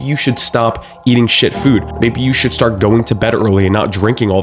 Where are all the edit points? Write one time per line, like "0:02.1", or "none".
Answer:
0:01.9